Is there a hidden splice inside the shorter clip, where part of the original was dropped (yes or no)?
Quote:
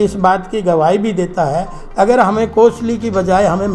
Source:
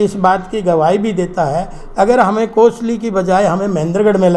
no